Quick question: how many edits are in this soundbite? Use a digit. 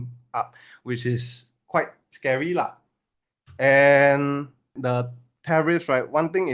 1